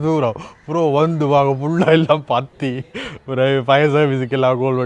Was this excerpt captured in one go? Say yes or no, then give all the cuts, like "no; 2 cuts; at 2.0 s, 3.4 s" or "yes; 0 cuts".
yes; 0 cuts